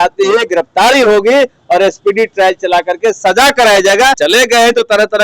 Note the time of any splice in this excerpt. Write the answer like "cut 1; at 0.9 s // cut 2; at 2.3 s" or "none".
cut 1; at 4.2 s